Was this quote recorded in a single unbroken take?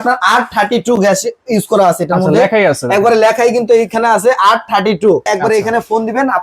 no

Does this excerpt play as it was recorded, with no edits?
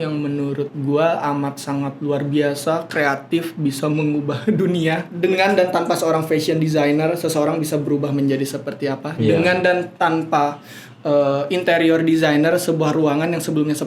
no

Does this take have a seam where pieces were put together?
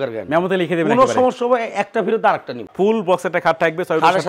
yes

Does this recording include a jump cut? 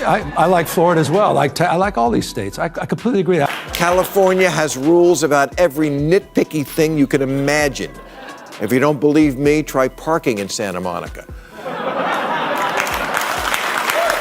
yes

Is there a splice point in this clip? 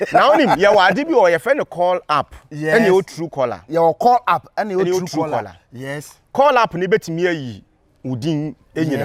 no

